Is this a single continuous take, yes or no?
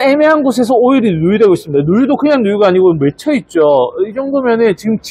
yes